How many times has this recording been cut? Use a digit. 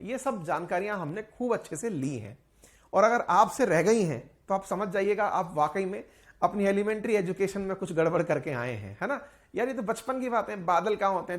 0